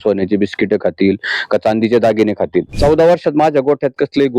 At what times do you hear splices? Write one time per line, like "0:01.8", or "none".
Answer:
0:02.7